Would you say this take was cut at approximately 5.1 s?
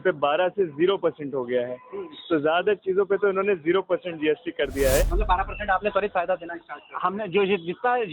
yes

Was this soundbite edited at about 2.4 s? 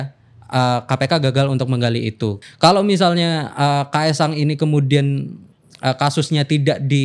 yes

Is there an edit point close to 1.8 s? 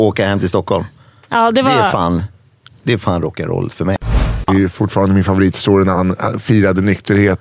no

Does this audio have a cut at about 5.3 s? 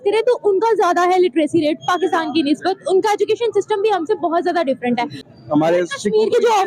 yes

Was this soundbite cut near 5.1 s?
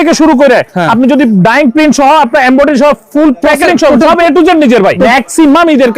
yes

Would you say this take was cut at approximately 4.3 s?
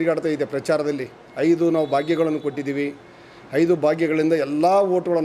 no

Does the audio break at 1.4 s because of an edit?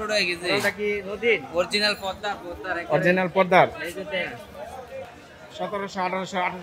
no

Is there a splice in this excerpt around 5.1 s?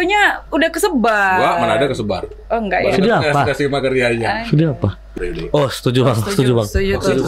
yes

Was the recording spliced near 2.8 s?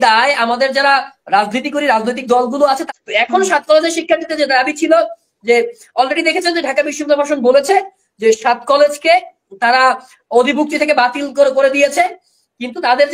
yes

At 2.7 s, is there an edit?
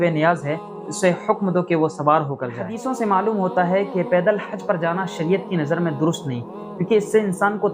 yes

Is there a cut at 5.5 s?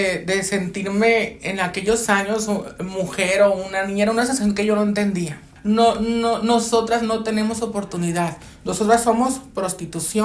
yes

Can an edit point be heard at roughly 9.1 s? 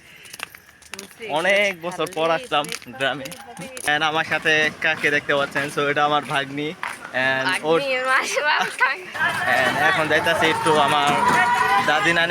yes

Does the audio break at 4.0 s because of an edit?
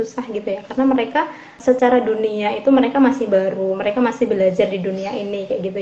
no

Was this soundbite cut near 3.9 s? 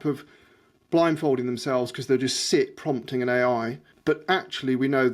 yes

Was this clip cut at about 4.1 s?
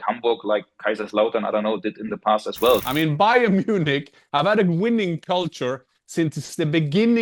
no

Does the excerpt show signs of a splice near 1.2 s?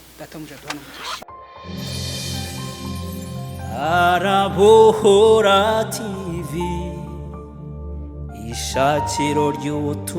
yes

